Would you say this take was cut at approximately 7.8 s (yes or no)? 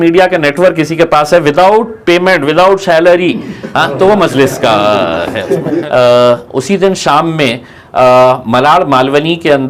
no